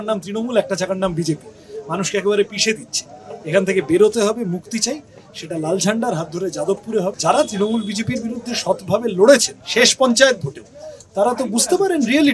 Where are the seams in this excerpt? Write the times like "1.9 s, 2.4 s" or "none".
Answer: 7.2 s

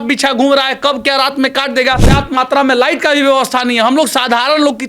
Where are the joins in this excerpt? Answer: 2.0 s

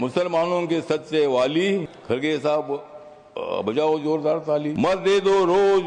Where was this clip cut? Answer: 1.9 s, 4.7 s

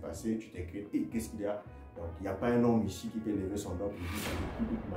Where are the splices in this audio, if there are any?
none

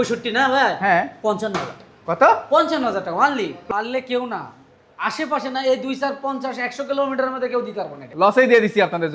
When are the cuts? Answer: 3.6 s, 8.0 s

